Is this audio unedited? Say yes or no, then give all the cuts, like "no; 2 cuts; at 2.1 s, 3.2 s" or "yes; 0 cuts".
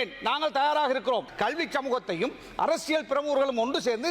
no; 1 cut; at 1.3 s